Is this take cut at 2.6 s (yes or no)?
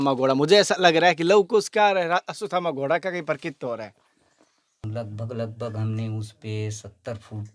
no